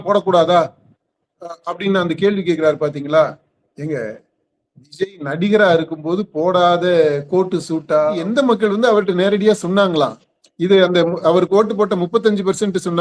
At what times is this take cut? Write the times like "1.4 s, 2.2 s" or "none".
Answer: 8.2 s